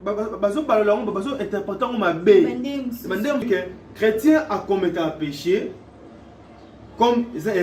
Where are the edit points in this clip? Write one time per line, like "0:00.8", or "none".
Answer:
0:03.4

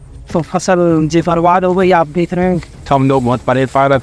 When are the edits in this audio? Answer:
0:02.7

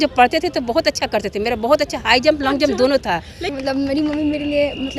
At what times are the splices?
0:03.4

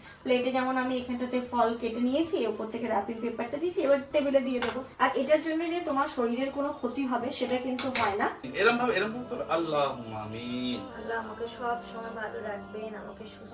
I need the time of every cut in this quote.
0:04.9
0:08.5

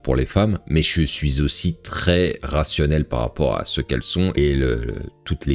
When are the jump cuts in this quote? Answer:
none

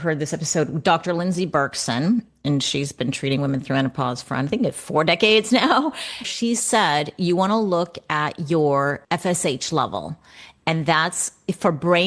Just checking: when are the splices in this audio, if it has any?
0:06.3
0:09.0

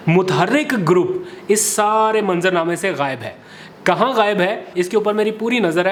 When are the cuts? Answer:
none

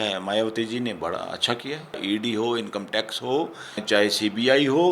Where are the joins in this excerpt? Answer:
0:02.0
0:03.8

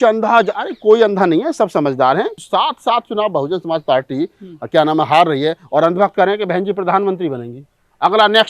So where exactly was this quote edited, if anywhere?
0:02.4

